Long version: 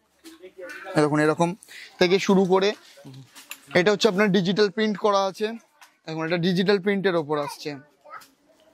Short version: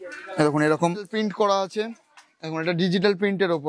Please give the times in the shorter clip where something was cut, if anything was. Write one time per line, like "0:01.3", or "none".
0:01.1

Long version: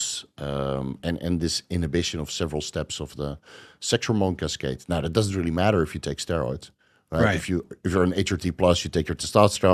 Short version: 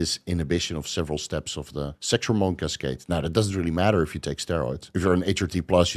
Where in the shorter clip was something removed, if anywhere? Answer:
0:02.0
0:04.9

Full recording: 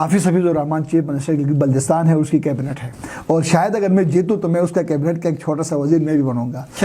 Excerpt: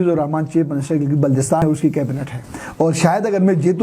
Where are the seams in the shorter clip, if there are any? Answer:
0:01.6

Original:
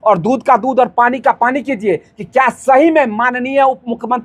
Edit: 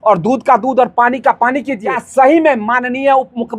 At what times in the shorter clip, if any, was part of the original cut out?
0:01.9

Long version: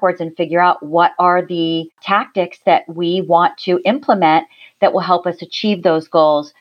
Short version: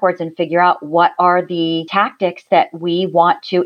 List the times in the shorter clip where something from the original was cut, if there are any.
0:01.9

